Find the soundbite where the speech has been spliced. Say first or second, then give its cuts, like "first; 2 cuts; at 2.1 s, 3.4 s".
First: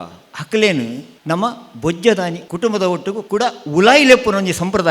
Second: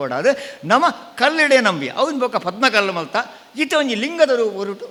first; 3 cuts; at 1.1 s, 2.4 s, 3.2 s